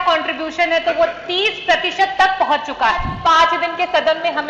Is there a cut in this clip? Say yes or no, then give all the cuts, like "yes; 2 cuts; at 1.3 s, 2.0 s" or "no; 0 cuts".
yes; 1 cut; at 3.1 s